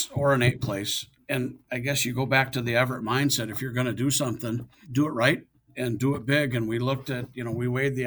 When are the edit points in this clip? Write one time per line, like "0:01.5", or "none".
0:01.3
0:04.8
0:05.7